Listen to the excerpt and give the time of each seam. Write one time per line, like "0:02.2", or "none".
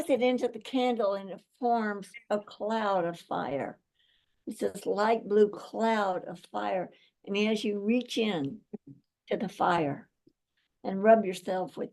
none